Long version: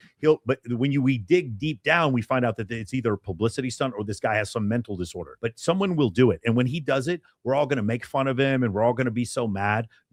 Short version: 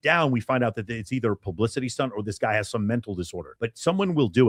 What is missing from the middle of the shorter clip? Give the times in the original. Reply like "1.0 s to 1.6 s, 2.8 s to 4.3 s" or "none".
none